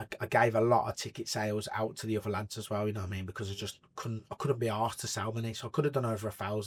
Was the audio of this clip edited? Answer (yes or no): no